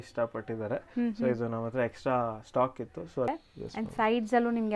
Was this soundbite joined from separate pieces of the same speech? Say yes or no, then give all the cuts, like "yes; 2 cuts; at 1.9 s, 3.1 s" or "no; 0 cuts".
yes; 1 cut; at 3.3 s